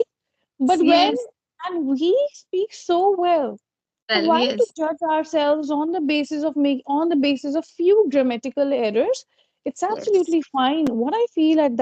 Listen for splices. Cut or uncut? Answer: uncut